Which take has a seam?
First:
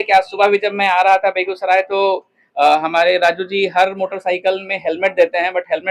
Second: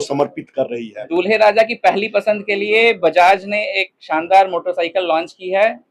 second; 1 cut; at 1.0 s

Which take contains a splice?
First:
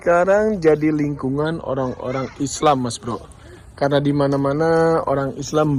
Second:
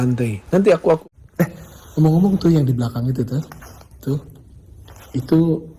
second; 1 cut; at 1.0 s

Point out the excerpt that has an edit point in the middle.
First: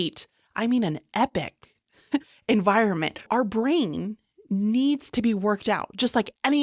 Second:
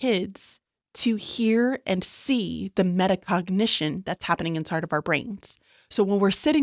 first; 1 cut; at 3.3 s

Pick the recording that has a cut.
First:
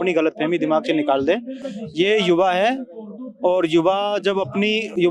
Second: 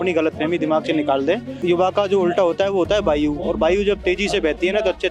second; 1 cut; at 1.5 s

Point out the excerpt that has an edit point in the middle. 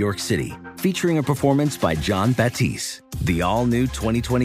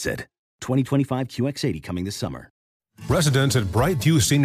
second; 1 cut; at 2.7 s

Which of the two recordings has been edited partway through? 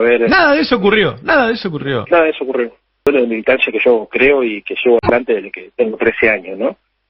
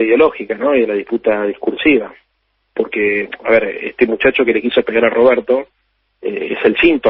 first; 1 cut; at 3.1 s

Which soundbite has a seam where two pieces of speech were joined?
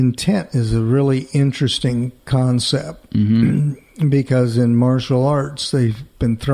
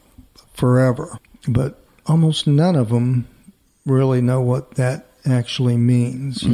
second; 1 cut; at 1.2 s

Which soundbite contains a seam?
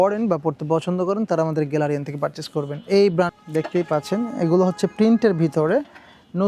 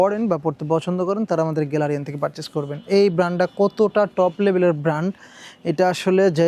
first; 1 cut; at 3.3 s

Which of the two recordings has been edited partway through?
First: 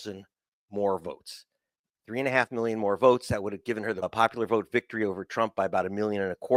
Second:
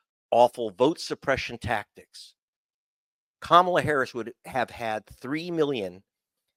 first; 1 cut; at 4.1 s

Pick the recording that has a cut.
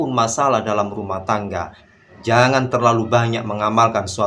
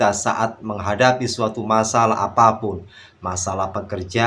first; 1 cut; at 1.8 s

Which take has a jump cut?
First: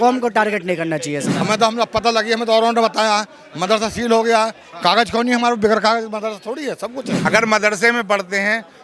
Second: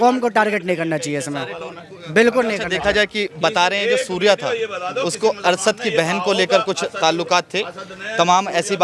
first; 2 cuts; at 1.3 s, 7.2 s

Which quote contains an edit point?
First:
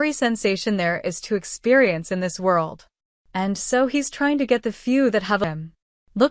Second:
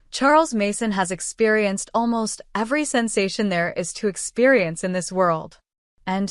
first; 1 cut; at 5.4 s

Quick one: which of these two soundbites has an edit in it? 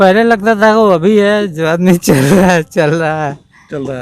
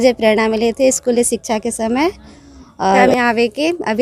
second; 1 cut; at 3.1 s

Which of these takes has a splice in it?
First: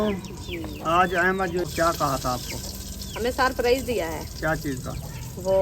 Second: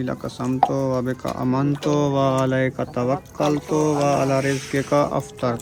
first; 1 cut; at 1.6 s

